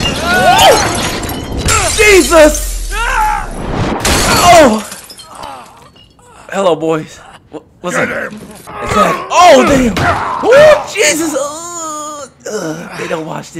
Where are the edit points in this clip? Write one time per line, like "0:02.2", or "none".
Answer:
0:08.7